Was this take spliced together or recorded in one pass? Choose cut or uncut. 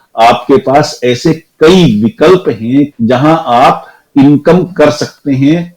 cut